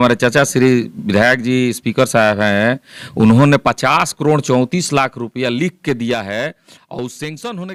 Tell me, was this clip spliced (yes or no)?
no